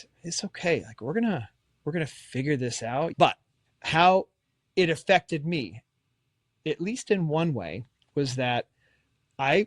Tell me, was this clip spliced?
yes; 1 cut; at 3.1 s

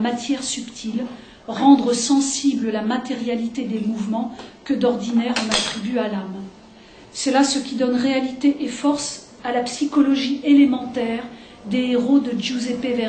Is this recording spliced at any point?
no; 0 cuts

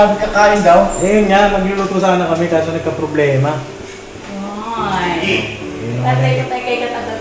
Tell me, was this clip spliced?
no; 0 cuts

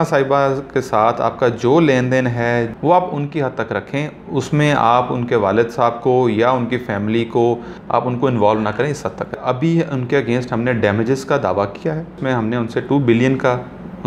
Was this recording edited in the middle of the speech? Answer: yes; 4 cuts; at 2.7 s, 7.7 s, 9.4 s, 12.2 s

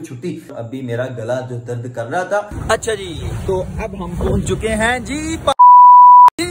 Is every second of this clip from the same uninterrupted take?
no; 1 cut; at 2.6 s

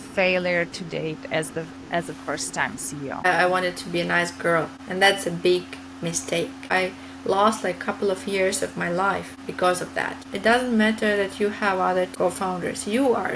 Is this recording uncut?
no; 6 cuts; at 3.2 s, 4.8 s, 6.7 s, 9.3 s, 10.3 s, 12.1 s

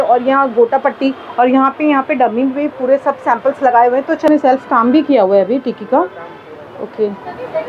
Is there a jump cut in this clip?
yes; 1 cut; at 4.3 s

